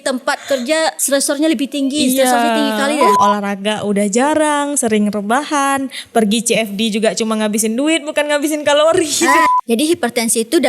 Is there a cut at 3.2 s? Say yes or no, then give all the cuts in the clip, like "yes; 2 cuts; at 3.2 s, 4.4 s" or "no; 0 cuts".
yes; 3 cuts; at 1.0 s, 3.2 s, 9.4 s